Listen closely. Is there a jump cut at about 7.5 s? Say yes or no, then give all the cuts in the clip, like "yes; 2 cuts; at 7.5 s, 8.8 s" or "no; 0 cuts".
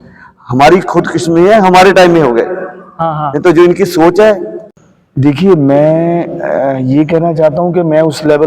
no; 1 cut; at 4.5 s